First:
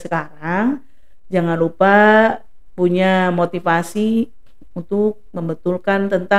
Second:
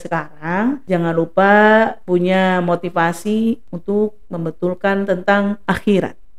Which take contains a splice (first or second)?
second